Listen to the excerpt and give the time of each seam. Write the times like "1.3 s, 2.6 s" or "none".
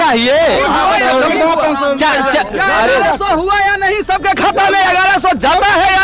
none